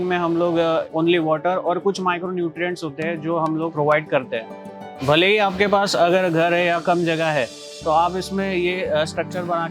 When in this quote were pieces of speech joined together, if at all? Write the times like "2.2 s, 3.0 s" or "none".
0.9 s, 3.7 s, 5.0 s